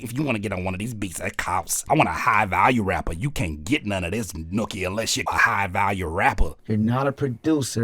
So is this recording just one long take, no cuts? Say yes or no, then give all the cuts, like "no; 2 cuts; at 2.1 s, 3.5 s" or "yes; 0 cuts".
no; 3 cuts; at 1.8 s, 5.2 s, 6.5 s